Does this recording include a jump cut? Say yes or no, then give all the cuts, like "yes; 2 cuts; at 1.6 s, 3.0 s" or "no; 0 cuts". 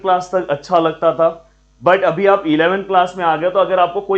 no; 0 cuts